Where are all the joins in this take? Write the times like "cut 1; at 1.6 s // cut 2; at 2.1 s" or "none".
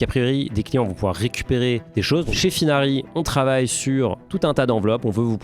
cut 1; at 2.3 s